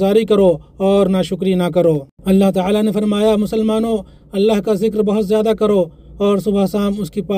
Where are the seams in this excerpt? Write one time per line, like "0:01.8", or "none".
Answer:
0:02.1